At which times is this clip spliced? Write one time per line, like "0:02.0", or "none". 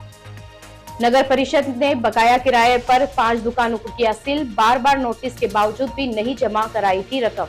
none